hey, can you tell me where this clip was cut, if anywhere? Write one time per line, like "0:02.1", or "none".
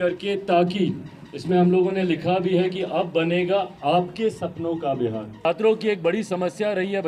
0:05.5